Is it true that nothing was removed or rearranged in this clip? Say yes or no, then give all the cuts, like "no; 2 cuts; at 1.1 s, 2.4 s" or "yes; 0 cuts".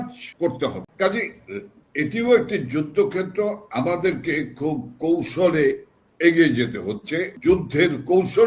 yes; 0 cuts